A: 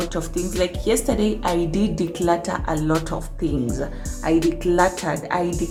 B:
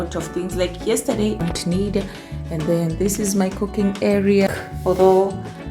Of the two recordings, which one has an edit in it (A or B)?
B